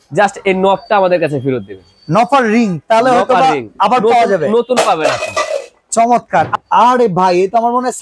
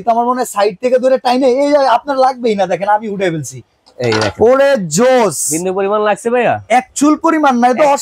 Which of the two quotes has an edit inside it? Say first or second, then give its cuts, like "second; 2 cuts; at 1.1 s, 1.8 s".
first; 1 cut; at 6.5 s